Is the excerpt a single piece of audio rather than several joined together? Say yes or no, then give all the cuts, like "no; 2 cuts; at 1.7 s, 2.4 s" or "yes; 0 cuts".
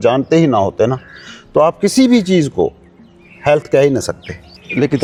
yes; 0 cuts